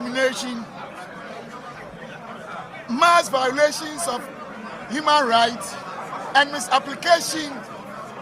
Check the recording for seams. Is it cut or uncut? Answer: uncut